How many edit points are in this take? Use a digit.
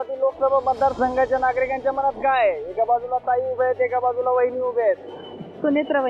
0